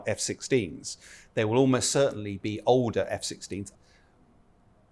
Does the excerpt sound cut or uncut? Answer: cut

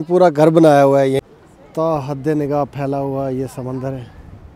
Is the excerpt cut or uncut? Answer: cut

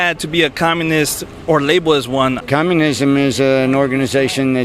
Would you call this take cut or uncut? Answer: cut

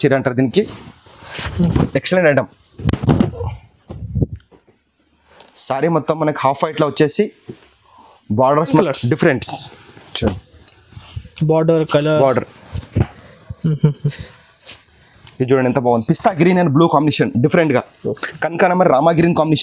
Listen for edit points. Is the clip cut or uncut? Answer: cut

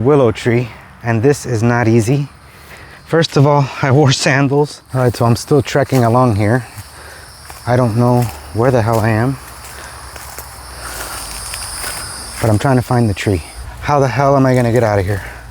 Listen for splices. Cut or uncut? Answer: cut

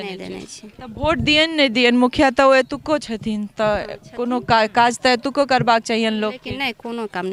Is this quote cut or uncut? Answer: uncut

